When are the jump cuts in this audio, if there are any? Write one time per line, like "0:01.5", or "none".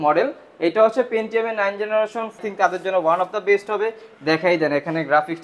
0:02.4